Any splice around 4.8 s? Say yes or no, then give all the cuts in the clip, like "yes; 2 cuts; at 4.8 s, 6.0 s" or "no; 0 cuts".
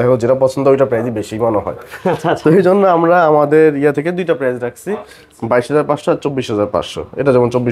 no; 0 cuts